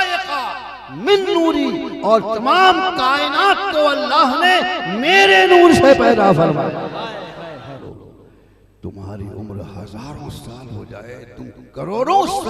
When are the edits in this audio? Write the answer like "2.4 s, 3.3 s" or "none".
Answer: 7.8 s